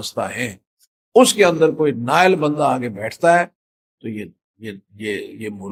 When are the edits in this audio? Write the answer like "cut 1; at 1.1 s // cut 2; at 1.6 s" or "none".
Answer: none